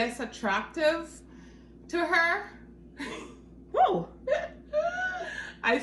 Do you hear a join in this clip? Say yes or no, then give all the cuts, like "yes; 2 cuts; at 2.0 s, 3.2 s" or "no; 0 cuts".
no; 0 cuts